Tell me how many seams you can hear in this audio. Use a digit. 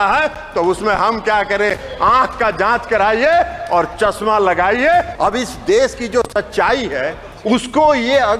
1